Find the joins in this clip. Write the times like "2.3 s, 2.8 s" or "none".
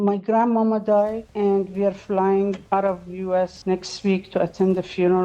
none